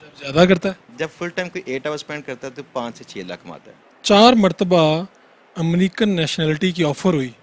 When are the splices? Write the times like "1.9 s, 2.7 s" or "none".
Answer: 3.9 s